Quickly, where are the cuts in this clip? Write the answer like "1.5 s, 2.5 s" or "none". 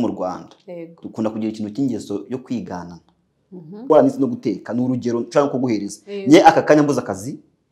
3.9 s